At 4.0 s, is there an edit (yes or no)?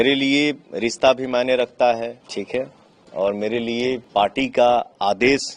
yes